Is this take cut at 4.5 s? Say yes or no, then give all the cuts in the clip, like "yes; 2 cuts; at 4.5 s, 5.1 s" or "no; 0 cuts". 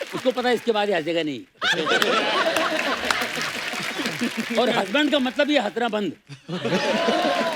no; 0 cuts